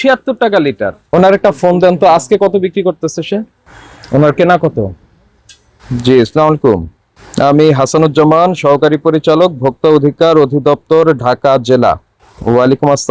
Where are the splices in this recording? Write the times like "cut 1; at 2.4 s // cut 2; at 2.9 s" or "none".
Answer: cut 1; at 1.0 s